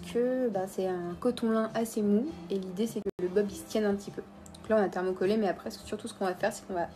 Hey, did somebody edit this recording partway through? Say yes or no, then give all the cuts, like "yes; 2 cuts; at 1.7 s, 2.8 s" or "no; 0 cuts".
yes; 1 cut; at 3.0 s